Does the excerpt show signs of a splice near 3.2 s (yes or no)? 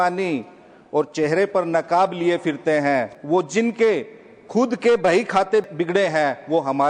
yes